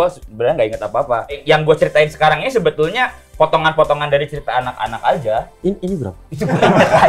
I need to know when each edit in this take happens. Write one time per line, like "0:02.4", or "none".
0:01.4